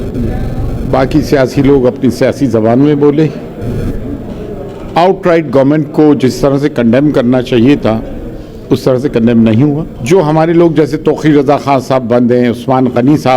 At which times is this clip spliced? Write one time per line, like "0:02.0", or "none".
0:09.9